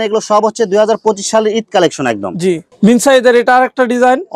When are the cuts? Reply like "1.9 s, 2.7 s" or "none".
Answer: 2.7 s